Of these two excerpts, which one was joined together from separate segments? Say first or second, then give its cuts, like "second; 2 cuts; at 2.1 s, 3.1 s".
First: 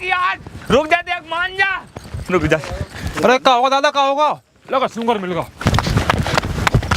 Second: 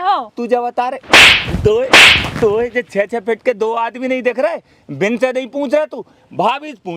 first; 2 cuts; at 3.1 s, 5.6 s